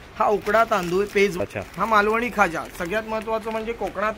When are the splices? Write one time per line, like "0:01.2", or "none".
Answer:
0:01.4